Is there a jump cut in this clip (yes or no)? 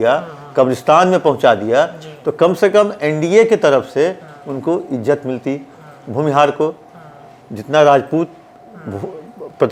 no